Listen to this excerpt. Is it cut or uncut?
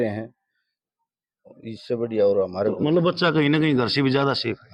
uncut